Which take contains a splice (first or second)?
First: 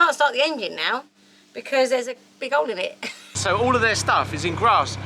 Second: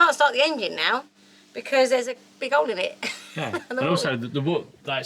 first